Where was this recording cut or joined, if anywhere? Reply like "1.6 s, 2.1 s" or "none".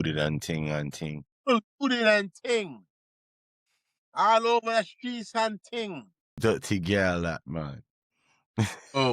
6.3 s